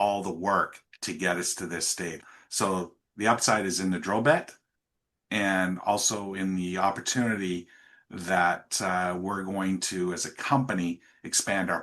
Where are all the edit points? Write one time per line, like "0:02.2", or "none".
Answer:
0:02.2